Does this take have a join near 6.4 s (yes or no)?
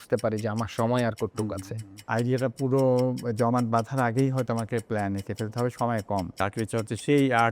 yes